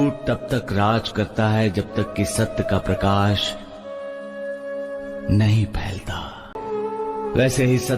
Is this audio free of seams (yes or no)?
no